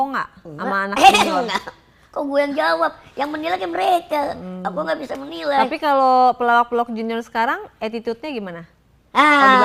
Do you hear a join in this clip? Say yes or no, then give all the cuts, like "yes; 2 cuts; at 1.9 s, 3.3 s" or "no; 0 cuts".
no; 0 cuts